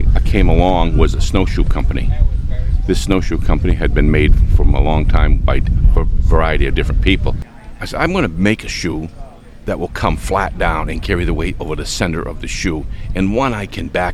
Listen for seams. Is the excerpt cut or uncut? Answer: cut